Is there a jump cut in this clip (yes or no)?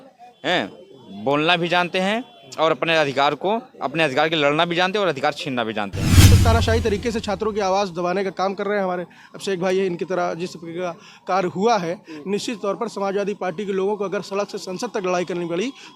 yes